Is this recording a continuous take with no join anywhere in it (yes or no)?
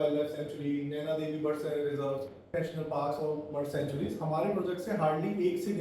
no